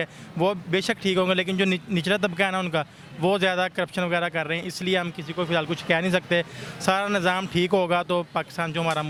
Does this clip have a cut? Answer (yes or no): no